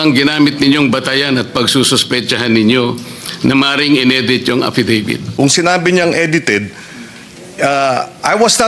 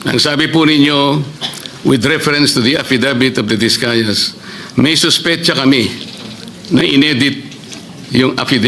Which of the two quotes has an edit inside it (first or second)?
first